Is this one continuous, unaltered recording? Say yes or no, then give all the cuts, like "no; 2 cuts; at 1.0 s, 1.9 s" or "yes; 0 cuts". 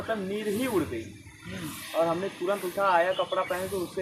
yes; 0 cuts